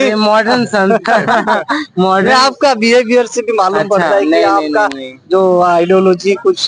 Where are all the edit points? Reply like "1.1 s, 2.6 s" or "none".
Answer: none